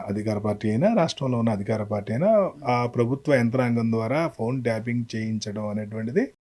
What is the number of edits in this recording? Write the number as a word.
zero